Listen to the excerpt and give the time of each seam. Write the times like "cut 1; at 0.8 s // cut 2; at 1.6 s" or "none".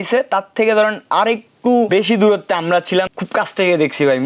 cut 1; at 1.9 s // cut 2; at 3.1 s